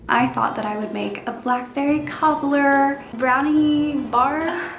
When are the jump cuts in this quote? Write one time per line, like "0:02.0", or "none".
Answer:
0:03.1